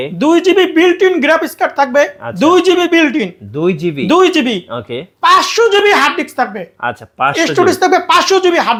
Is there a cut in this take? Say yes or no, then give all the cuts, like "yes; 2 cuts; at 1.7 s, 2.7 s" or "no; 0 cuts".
no; 0 cuts